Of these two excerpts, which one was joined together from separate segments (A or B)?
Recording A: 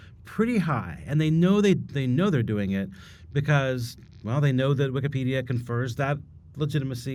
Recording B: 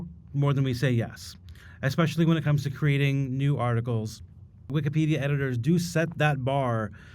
B